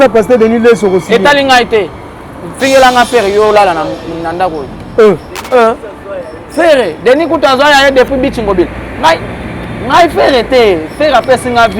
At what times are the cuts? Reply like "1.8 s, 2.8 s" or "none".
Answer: none